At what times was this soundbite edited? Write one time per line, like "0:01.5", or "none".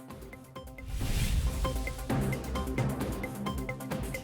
0:01.0